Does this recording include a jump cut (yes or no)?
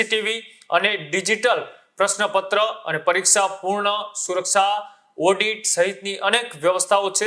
no